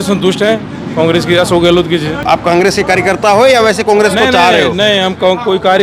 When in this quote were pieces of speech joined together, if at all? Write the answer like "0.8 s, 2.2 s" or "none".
2.2 s